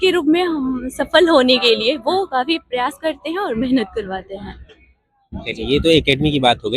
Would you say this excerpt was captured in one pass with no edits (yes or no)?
yes